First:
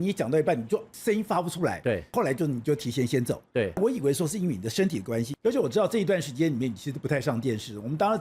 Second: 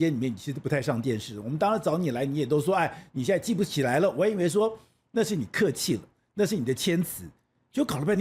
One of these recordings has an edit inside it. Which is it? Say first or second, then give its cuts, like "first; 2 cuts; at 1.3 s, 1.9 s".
first; 4 cuts; at 0.9 s, 2.1 s, 3.8 s, 5.3 s